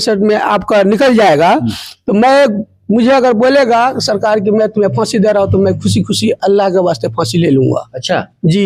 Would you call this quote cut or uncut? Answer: uncut